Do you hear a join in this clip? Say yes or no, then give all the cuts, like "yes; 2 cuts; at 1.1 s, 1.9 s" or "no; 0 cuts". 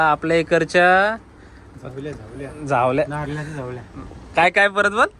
no; 0 cuts